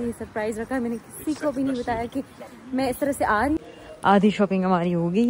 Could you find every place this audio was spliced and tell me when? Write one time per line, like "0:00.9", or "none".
0:03.6